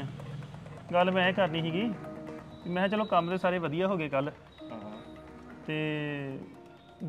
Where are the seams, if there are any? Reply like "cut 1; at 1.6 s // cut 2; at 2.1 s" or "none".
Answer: none